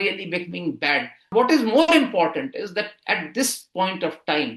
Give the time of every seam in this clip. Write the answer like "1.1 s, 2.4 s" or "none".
1.3 s